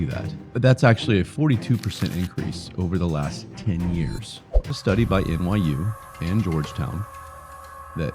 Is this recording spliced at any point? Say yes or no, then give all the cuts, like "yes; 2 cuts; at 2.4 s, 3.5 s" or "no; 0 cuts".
yes; 1 cut; at 4.7 s